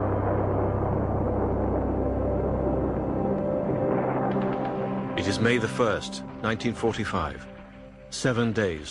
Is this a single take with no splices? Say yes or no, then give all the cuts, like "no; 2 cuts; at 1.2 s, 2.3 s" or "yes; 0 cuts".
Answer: no; 1 cut; at 7.0 s